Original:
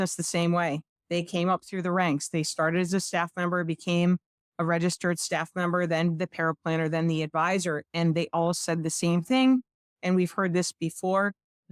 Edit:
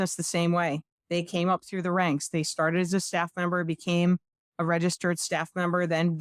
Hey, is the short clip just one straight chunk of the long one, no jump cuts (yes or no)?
yes